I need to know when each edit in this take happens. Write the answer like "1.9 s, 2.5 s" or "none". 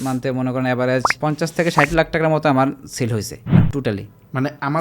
1.1 s, 3.4 s

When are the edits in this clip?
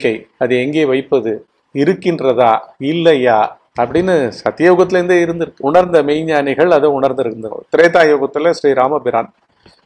5.5 s, 7.5 s

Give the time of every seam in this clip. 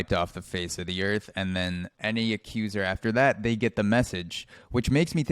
1.9 s

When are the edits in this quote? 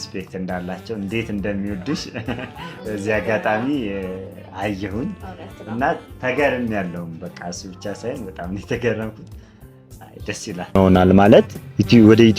10.8 s

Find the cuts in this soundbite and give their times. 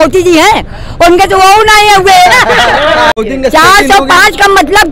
3.1 s

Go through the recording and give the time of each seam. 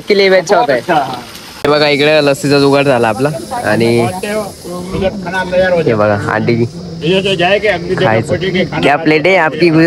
1.6 s

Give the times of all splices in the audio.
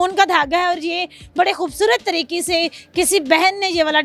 none

